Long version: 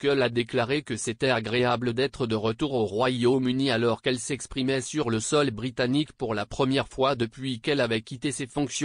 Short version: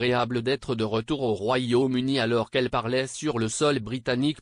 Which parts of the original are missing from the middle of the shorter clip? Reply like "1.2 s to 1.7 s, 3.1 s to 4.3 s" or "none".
4.6 s to 4.8 s